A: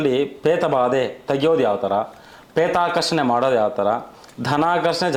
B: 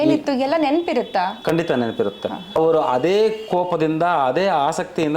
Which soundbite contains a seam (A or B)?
B